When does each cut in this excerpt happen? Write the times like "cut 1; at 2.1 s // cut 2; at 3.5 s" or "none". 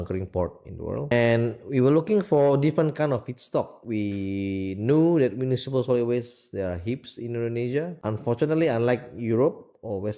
cut 1; at 1.1 s // cut 2; at 3.8 s // cut 3; at 7.9 s